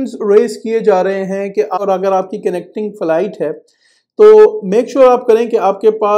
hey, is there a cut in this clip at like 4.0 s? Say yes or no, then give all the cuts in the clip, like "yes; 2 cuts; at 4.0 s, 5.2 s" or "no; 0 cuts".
no; 1 cut; at 1.8 s